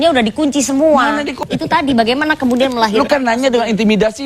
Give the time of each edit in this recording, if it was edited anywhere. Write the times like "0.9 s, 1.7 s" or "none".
1.4 s